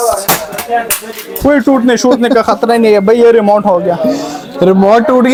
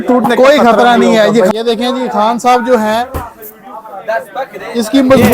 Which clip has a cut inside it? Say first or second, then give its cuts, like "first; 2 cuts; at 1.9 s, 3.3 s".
second; 1 cut; at 1.5 s